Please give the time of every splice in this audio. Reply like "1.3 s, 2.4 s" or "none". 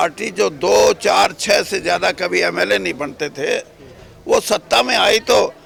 none